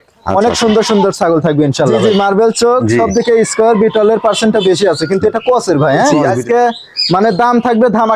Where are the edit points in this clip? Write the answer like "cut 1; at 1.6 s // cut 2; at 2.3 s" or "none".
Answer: cut 1; at 2.0 s // cut 2; at 6.2 s